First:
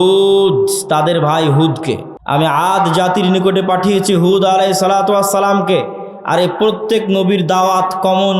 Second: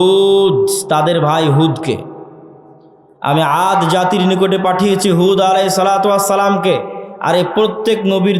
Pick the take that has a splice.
first; 1 cut; at 2.1 s

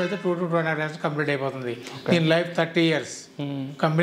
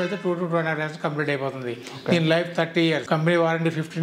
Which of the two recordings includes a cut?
second; 1 cut; at 3.0 s

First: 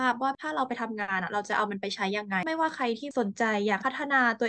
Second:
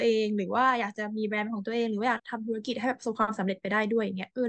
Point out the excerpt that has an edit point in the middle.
first; 1 cut; at 2.4 s

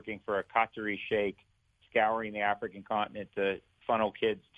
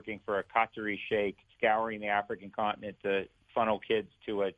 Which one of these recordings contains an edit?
second; 1 cut; at 1.4 s

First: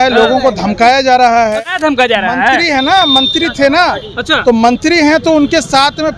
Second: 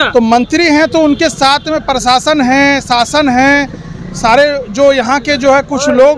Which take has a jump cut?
first; 1 cut; at 1.9 s

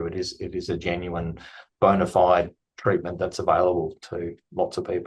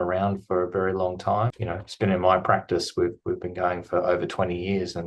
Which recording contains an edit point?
second; 1 cut; at 1.6 s

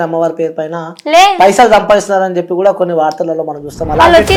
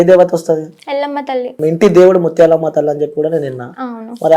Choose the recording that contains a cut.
second; 1 cut; at 1.5 s

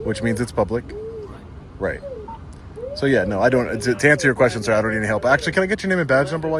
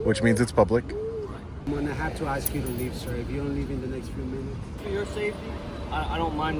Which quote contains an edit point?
second; 2 cuts; at 1.6 s, 4.8 s

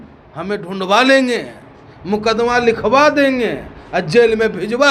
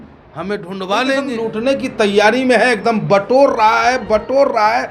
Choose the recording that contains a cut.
second; 1 cut; at 1.3 s

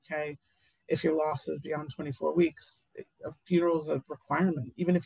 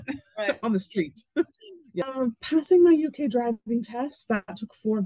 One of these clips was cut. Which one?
second; 1 cut; at 2.1 s

